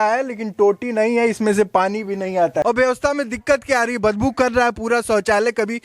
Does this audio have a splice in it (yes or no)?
yes